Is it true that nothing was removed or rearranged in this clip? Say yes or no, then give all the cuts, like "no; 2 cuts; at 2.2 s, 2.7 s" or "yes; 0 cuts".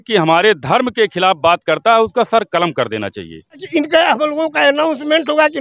no; 1 cut; at 3.6 s